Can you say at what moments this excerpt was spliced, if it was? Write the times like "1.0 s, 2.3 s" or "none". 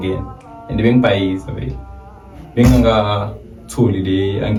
none